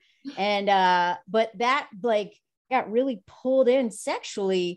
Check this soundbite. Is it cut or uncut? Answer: cut